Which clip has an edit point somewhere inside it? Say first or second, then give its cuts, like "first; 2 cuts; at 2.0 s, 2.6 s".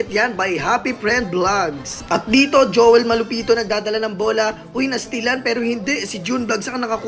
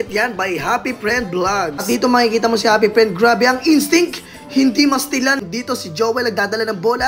second; 2 cuts; at 1.8 s, 5.4 s